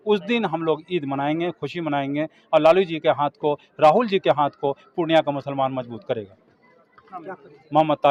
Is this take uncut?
yes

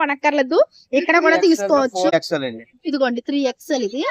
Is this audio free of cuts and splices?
no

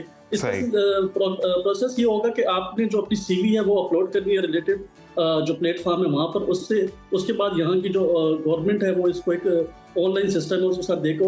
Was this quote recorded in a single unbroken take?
yes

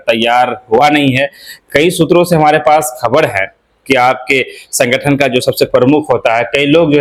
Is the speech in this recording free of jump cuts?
yes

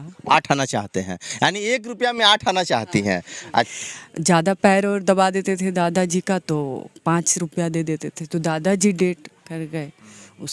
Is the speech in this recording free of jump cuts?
no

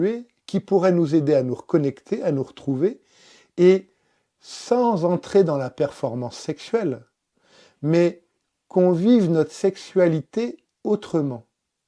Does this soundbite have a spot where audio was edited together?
no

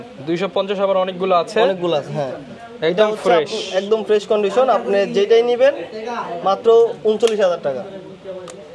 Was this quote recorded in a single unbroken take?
yes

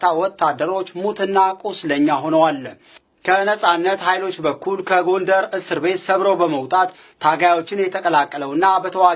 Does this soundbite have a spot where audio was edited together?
yes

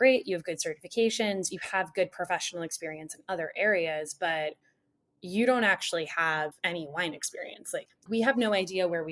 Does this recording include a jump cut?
yes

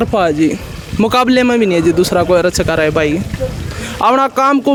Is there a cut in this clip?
no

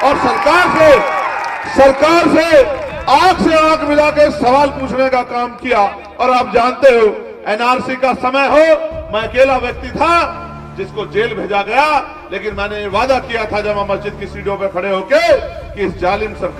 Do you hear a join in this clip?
no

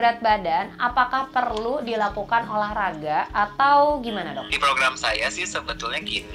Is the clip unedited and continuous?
no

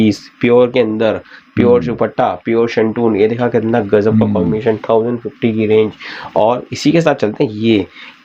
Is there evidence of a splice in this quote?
no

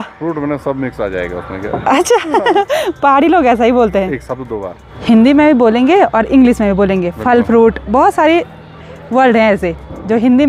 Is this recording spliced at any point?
no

